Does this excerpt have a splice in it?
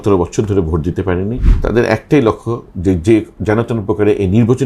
yes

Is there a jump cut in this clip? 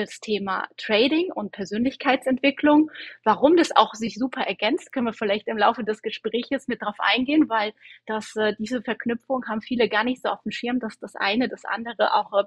no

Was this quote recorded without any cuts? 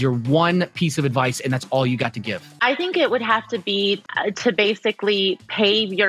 no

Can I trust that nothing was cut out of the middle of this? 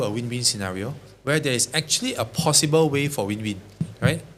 yes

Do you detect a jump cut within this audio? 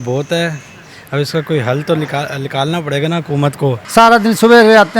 yes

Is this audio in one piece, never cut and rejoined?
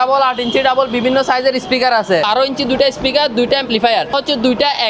no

